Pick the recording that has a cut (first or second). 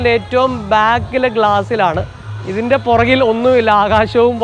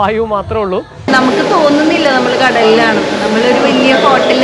second